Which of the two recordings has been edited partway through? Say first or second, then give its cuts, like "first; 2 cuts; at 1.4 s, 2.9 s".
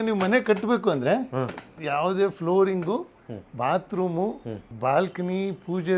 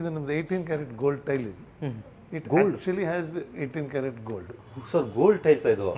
first; 2 cuts; at 1.7 s, 4.6 s